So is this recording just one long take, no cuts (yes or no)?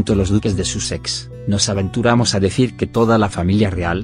no